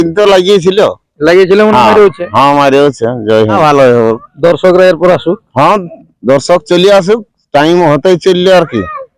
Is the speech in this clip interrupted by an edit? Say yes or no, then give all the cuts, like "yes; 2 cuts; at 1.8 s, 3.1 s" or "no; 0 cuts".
yes; 1 cut; at 3.6 s